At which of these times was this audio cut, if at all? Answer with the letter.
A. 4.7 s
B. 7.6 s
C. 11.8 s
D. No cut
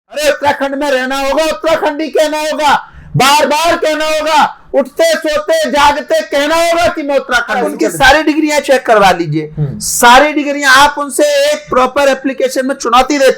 B